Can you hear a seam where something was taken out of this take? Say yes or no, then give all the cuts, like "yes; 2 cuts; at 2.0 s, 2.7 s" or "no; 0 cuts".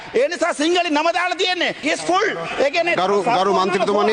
yes; 1 cut; at 1.8 s